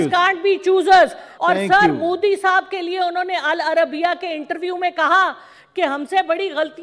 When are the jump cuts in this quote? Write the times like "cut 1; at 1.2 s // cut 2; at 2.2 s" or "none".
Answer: cut 1; at 1.3 s